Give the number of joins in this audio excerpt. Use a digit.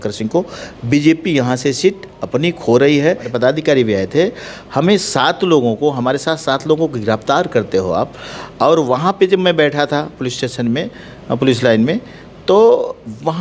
1